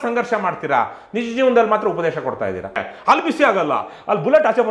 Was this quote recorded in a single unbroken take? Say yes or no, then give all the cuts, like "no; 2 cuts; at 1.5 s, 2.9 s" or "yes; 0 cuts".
no; 1 cut; at 2.9 s